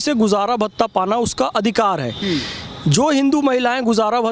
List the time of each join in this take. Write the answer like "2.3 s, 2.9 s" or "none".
none

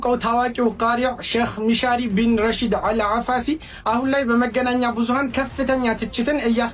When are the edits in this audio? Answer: none

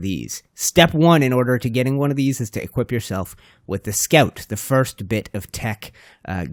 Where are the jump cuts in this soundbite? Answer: none

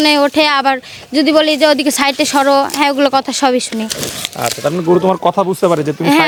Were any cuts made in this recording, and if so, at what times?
none

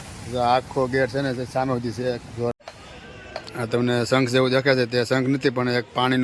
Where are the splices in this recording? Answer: 2.6 s

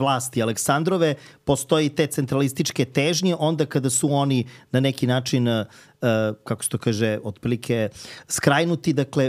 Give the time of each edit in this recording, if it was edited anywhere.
none

